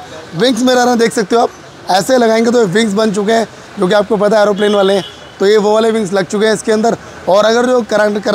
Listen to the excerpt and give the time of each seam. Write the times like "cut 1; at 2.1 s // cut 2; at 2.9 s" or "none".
none